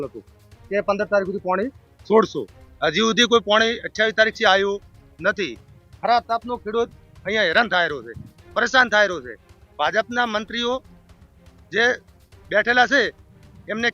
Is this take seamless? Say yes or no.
yes